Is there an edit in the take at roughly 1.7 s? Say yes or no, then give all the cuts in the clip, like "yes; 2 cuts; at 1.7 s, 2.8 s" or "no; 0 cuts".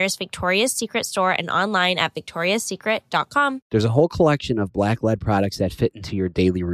no; 1 cut; at 3.6 s